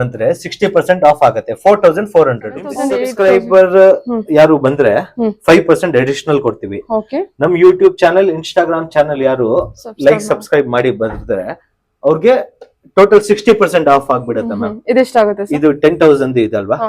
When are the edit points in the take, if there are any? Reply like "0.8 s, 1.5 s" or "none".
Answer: 3.0 s